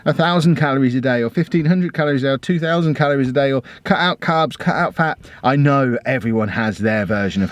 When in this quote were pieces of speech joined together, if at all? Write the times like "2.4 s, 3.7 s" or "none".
none